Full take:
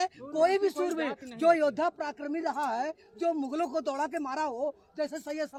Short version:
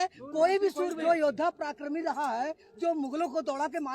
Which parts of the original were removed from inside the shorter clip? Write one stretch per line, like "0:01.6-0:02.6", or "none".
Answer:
0:00.9-0:01.3